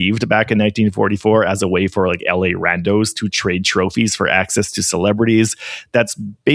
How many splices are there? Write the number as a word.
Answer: zero